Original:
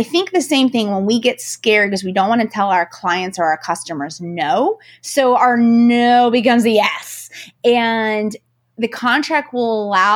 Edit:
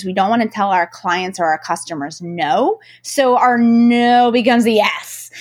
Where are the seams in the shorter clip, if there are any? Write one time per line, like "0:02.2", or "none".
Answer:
none